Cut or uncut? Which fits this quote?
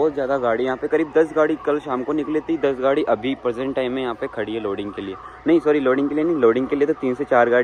uncut